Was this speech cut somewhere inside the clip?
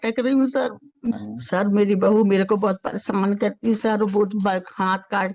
yes; 1 cut; at 1.2 s

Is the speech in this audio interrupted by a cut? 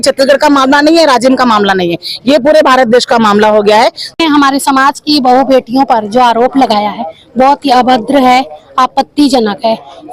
yes; 1 cut; at 4.2 s

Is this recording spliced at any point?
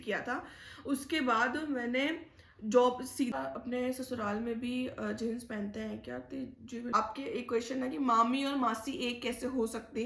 yes; 2 cuts; at 3.3 s, 6.9 s

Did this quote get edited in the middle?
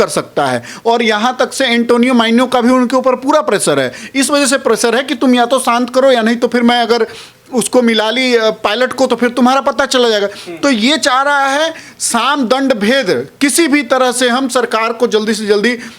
no; 0 cuts

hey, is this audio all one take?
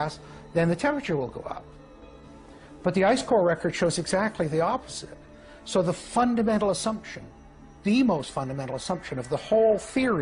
no; 1 cut; at 7.8 s

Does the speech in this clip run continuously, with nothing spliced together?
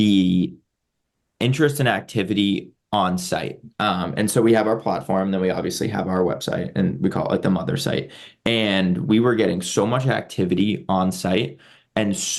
yes; 0 cuts

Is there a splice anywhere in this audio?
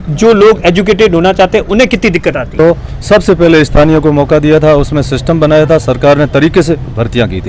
yes; 1 cut; at 2.5 s

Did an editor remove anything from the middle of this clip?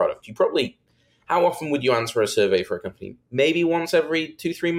no; 0 cuts

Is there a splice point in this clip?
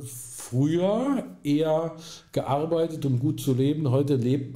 no; 0 cuts

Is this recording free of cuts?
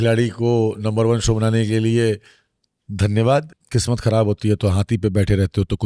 no; 1 cut; at 3.6 s

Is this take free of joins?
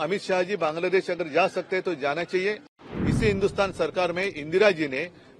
no; 1 cut; at 2.7 s

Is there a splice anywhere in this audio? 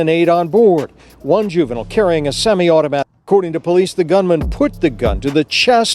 yes; 1 cut; at 3.1 s

